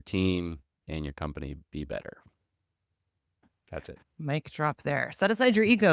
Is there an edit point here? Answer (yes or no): no